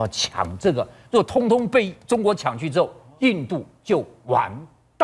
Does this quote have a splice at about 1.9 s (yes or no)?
no